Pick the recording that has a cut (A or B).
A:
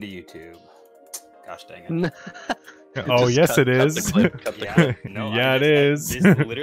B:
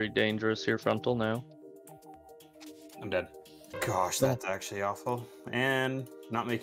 B